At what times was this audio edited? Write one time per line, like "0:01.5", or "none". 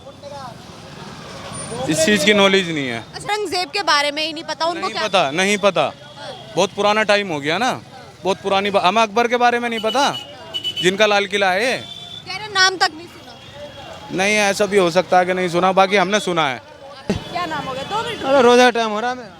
0:03.3
0:17.1